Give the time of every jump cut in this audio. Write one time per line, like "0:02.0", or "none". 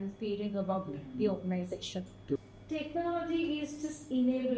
0:02.4